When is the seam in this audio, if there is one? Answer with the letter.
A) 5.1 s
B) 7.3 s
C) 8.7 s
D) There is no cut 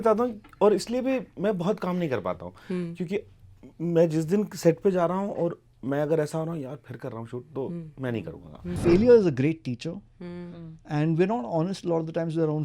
C